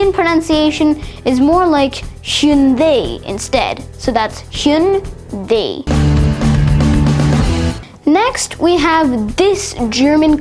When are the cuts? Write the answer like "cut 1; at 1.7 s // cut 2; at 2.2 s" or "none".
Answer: cut 1; at 5.8 s // cut 2; at 7.8 s